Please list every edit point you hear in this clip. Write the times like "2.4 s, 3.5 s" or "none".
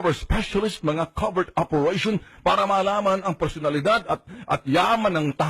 3.6 s